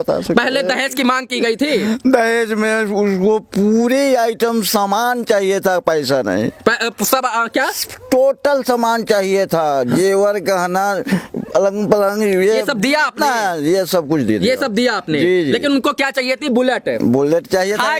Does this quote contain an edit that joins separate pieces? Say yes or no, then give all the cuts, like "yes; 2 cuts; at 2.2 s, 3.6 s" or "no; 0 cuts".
no; 0 cuts